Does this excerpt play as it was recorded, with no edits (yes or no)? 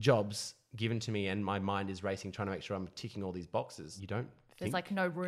no